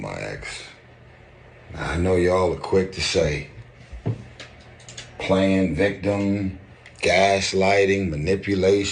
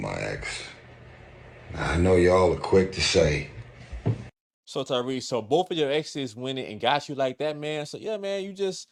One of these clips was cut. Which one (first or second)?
first